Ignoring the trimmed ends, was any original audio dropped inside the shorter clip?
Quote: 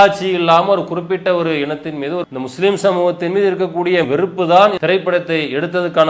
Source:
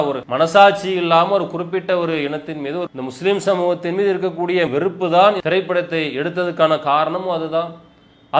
no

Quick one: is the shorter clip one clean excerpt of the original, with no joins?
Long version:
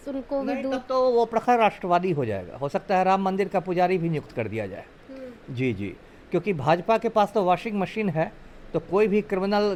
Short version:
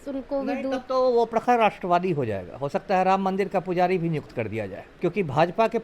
no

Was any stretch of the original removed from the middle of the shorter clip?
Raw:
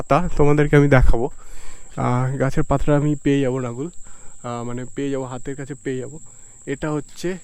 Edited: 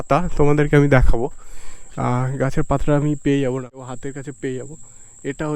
yes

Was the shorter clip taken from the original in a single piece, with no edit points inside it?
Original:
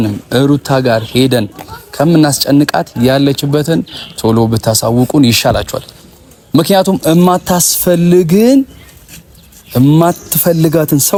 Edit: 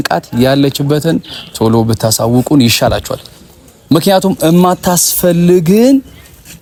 yes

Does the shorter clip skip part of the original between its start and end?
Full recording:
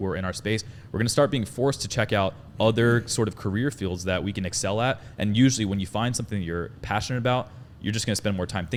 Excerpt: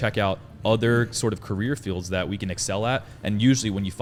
no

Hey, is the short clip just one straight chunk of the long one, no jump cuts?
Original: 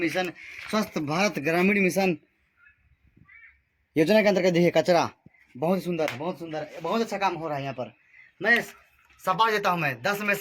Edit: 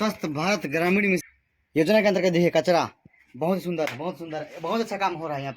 no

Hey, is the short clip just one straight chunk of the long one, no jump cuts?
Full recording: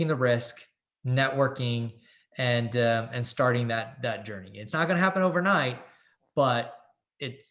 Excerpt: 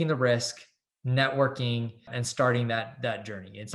no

